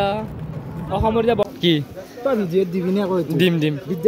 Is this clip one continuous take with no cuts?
no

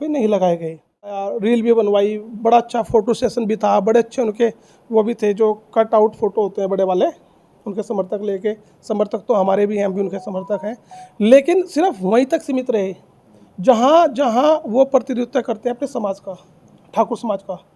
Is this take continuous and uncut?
no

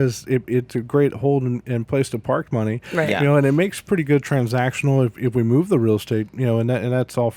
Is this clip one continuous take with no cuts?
yes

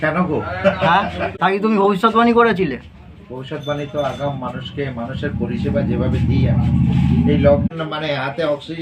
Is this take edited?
yes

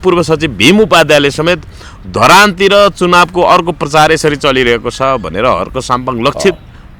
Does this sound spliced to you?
no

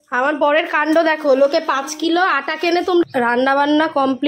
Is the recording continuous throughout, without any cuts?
no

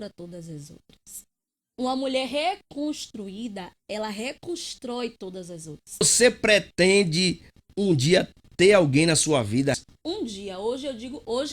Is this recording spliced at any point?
yes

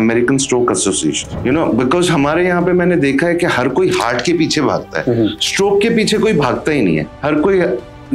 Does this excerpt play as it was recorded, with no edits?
no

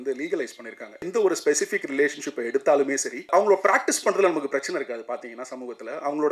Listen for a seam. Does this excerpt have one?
yes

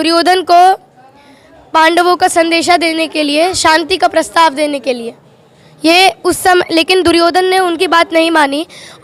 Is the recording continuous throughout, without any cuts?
yes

